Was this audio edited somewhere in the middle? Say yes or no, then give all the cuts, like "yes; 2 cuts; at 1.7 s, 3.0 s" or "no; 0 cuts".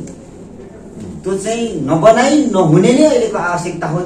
no; 0 cuts